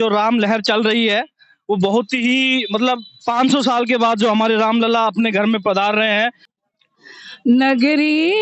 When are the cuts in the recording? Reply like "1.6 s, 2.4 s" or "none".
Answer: 6.5 s